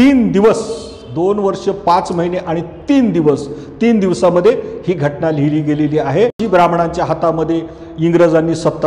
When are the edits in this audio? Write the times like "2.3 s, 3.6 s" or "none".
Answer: 6.4 s